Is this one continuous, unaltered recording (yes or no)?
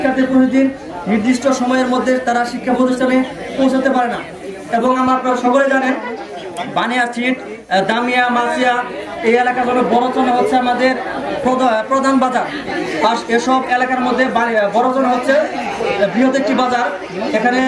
yes